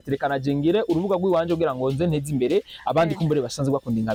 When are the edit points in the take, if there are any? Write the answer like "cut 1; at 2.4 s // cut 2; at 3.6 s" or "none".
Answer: none

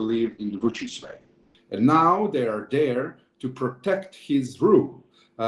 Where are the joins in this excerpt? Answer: cut 1; at 1.4 s

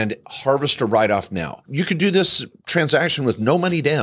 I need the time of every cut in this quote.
cut 1; at 1.6 s

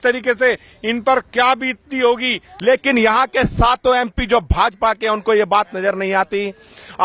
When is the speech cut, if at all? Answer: cut 1; at 2.4 s

